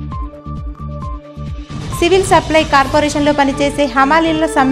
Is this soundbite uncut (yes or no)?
yes